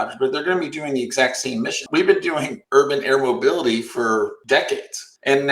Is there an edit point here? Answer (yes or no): yes